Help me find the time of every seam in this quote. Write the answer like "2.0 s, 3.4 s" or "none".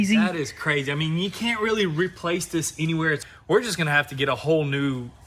3.3 s